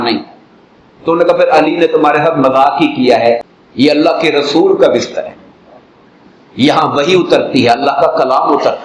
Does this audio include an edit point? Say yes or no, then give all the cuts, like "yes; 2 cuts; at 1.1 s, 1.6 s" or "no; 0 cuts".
yes; 1 cut; at 3.5 s